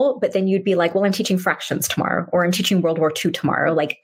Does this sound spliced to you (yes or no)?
no